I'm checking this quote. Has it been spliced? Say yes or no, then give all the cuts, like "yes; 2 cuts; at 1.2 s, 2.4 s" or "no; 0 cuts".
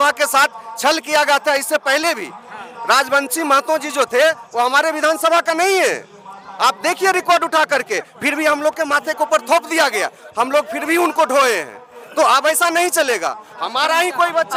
no; 0 cuts